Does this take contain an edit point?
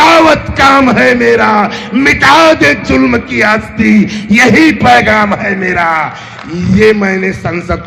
no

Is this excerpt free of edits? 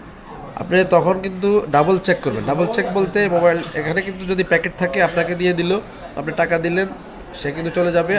yes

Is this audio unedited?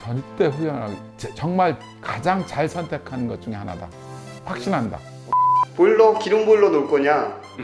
no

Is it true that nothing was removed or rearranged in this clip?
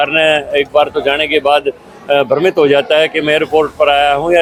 yes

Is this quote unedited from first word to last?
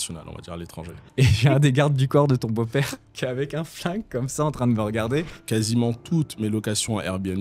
no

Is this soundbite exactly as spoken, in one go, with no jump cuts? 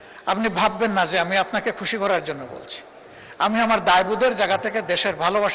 yes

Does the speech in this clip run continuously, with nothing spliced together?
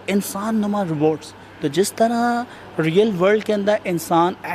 yes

